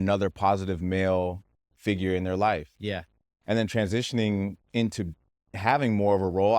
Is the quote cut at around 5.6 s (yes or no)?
yes